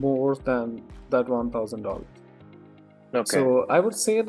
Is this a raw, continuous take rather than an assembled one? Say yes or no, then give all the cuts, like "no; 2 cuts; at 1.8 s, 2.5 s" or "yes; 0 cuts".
yes; 0 cuts